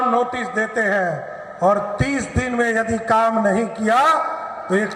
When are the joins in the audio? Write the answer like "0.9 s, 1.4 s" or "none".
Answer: none